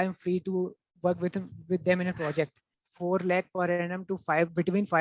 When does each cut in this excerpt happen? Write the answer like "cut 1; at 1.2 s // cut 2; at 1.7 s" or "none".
cut 1; at 2.8 s

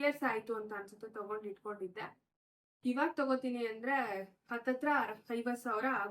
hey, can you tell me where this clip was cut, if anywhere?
none

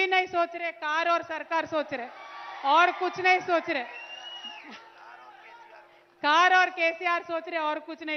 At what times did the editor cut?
none

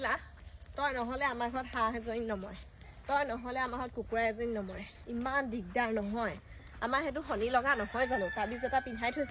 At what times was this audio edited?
none

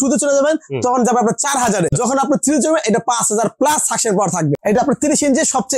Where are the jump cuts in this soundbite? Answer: cut 1; at 2.1 s // cut 2; at 4.8 s

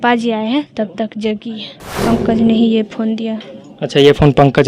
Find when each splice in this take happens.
cut 1; at 2.0 s

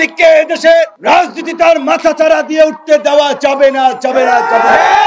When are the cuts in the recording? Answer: cut 1; at 1.0 s

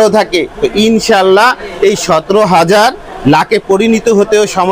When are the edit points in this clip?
none

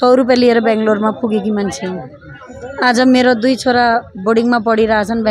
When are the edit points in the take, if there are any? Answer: none

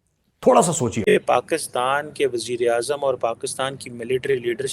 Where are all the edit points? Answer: cut 1; at 1.0 s

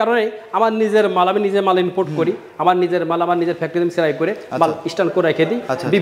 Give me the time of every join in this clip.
none

